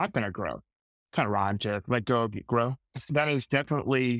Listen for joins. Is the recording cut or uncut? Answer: cut